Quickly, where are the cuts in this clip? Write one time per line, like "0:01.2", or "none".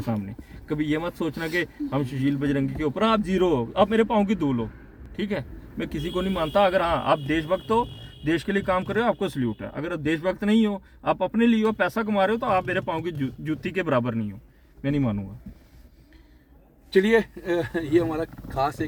none